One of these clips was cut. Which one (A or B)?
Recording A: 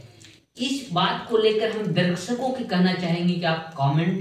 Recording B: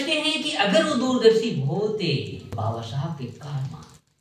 B